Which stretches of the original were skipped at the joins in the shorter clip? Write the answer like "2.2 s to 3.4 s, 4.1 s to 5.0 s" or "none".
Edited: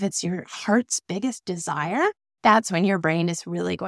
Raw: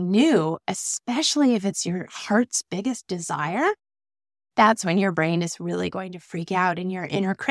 3.9 s to 4.4 s